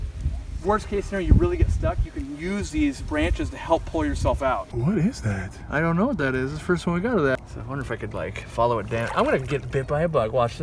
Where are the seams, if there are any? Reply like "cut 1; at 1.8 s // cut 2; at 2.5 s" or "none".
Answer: cut 1; at 4.7 s // cut 2; at 7.4 s